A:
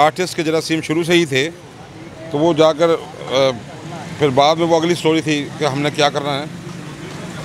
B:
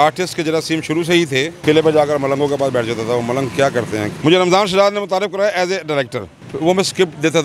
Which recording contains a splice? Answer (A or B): B